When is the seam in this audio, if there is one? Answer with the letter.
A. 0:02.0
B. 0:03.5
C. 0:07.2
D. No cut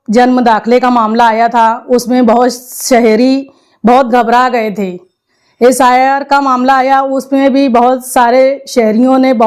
D